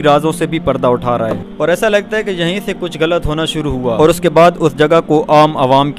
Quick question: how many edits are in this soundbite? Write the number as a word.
two